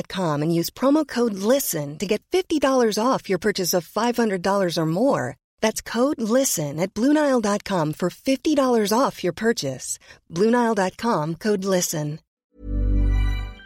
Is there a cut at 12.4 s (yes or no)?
yes